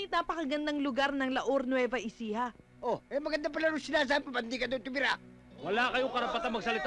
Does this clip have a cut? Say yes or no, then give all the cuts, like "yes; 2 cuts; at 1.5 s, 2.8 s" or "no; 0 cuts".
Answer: no; 0 cuts